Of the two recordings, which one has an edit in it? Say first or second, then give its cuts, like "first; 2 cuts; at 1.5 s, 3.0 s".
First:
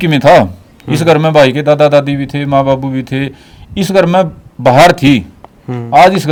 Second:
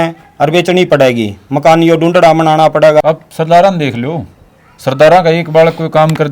second; 1 cut; at 3.0 s